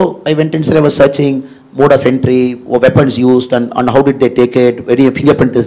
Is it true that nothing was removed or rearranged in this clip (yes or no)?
yes